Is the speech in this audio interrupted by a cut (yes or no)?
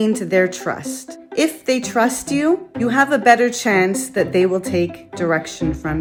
no